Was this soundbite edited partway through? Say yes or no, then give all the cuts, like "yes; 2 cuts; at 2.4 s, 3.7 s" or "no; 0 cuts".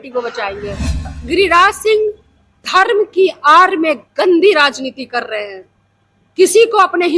yes; 1 cut; at 1.1 s